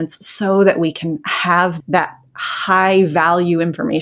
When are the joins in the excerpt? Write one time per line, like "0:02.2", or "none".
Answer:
0:01.8